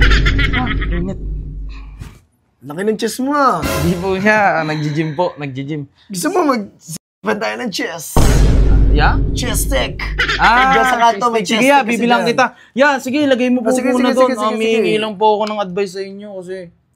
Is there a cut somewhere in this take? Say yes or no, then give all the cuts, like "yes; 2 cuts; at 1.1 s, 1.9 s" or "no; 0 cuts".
no; 0 cuts